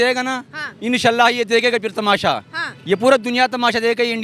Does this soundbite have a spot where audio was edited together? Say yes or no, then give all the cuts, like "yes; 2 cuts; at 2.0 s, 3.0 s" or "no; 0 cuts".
no; 0 cuts